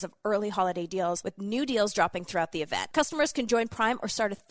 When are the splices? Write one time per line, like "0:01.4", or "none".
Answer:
0:01.3
0:02.8